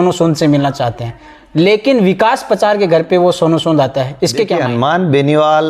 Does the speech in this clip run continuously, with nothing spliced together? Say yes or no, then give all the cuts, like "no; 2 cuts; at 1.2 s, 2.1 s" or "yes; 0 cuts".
no; 1 cut; at 4.6 s